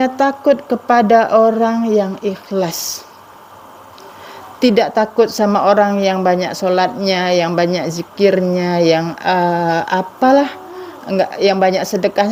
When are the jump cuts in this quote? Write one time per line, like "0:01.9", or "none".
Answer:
none